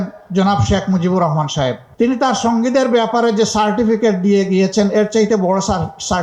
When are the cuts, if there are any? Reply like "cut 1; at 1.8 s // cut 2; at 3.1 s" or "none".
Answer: none

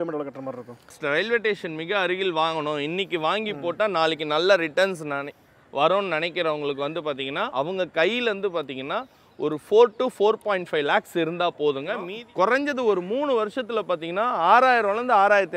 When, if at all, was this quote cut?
cut 1; at 1.0 s // cut 2; at 7.5 s // cut 3; at 12.1 s

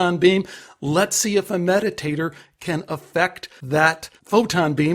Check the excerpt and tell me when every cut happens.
cut 1; at 3.7 s

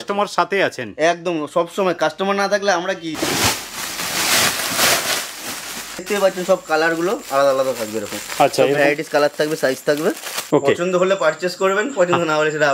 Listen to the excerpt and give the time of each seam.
cut 1; at 3.1 s // cut 2; at 6.0 s // cut 3; at 10.3 s

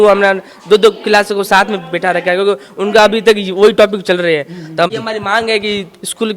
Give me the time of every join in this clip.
cut 1; at 4.9 s

